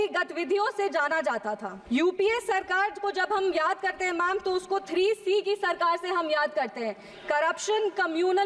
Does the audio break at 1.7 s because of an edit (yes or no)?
yes